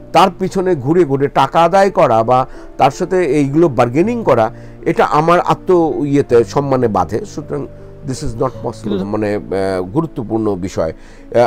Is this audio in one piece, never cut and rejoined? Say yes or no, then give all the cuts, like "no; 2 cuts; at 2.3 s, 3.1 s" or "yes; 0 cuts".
yes; 0 cuts